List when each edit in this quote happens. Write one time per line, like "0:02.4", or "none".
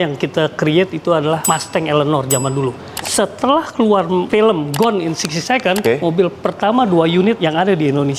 0:03.0
0:05.8